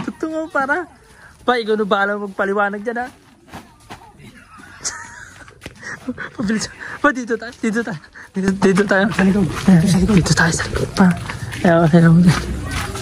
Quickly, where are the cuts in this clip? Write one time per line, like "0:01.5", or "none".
none